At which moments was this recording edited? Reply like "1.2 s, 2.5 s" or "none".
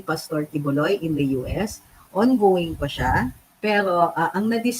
3.4 s